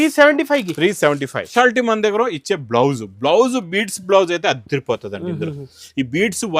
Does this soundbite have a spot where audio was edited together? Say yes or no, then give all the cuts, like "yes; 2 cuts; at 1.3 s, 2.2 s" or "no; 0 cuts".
yes; 1 cut; at 1.5 s